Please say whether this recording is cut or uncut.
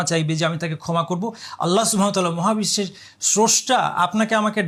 uncut